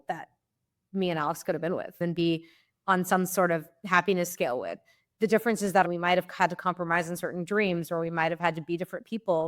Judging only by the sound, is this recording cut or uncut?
cut